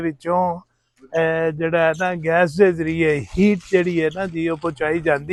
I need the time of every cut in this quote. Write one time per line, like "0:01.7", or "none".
none